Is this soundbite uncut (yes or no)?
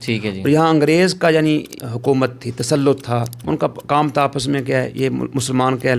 no